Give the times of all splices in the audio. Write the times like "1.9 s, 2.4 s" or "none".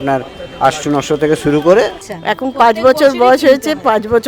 2.0 s